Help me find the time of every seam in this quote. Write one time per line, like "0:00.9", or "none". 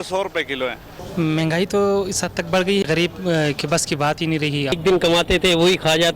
0:01.0
0:02.8
0:04.8